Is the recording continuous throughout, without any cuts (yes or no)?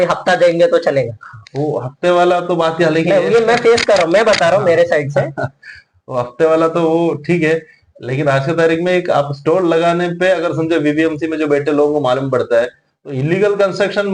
yes